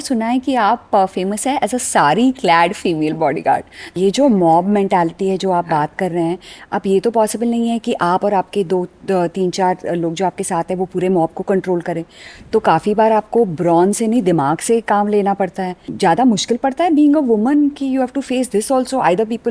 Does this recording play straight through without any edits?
no; 2 cuts; at 4.0 s, 15.9 s

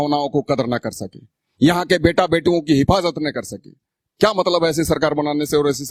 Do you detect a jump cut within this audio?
no; 0 cuts

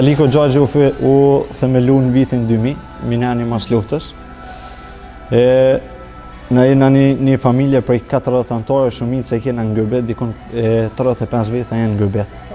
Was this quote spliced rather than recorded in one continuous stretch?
no; 0 cuts

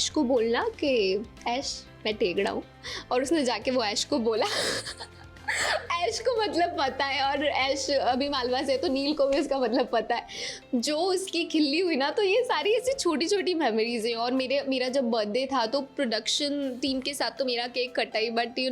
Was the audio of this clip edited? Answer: no; 0 cuts

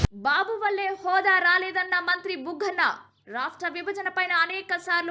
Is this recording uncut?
yes; 0 cuts

